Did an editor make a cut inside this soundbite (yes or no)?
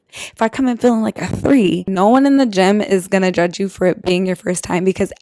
yes